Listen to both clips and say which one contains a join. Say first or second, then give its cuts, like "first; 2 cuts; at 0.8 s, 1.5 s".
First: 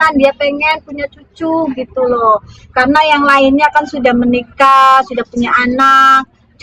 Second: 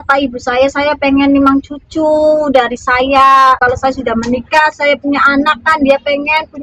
second; 1 cut; at 3.6 s